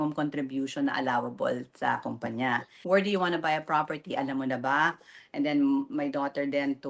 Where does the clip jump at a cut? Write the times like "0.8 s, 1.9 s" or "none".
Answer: 2.7 s